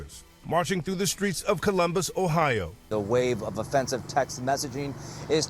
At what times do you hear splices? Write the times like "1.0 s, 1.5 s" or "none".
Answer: 2.8 s